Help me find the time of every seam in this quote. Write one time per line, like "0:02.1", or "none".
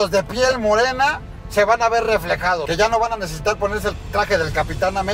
0:02.6